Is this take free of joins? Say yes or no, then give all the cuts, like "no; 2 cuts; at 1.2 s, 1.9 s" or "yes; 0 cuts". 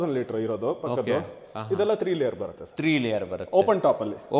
yes; 0 cuts